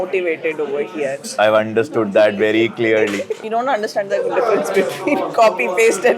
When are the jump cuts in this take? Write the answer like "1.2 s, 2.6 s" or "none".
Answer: 1.3 s, 3.3 s